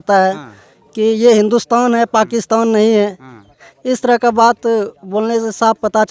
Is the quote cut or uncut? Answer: uncut